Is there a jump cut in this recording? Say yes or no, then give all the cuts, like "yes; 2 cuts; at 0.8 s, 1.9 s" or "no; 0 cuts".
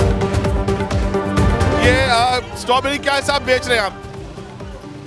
no; 0 cuts